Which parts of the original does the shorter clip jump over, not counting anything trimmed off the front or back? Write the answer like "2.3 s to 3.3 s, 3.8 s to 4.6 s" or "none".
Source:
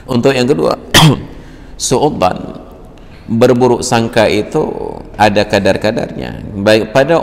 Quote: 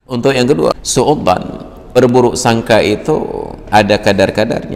0.8 s to 1.8 s, 2.9 s to 3.4 s